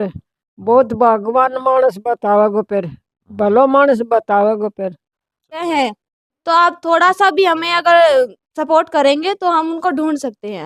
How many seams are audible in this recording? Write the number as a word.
one